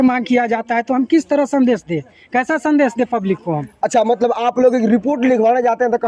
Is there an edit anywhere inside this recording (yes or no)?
no